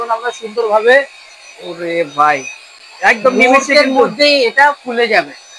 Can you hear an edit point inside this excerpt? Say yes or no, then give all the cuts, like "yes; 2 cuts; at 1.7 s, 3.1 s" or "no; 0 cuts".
no; 0 cuts